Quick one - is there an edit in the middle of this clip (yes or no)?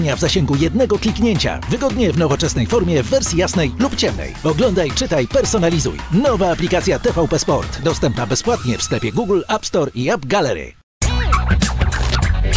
yes